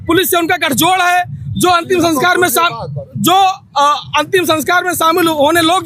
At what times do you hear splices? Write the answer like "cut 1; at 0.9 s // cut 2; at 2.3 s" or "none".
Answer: none